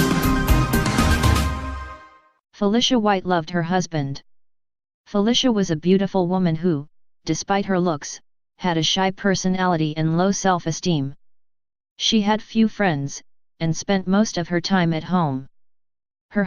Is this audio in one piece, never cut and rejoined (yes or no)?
no